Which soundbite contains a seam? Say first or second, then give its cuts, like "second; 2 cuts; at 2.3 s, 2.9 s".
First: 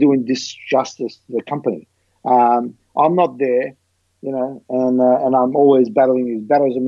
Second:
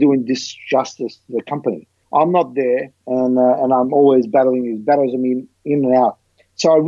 second; 2 cuts; at 2.0 s, 3.0 s